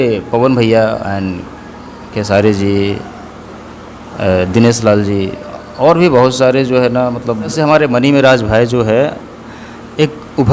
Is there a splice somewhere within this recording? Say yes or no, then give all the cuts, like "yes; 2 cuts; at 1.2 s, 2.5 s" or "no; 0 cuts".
yes; 1 cut; at 7.5 s